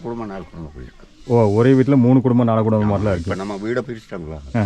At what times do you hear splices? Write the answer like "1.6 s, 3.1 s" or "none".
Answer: none